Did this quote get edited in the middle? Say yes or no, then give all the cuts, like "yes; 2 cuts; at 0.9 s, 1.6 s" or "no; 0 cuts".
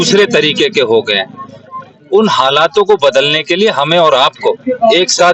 no; 0 cuts